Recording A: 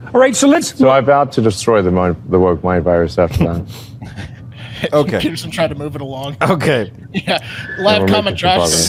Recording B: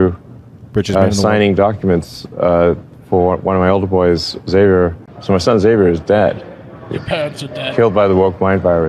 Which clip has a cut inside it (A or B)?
B